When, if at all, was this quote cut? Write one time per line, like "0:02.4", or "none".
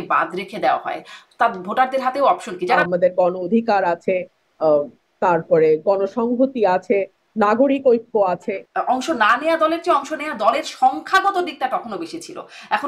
0:02.8
0:08.5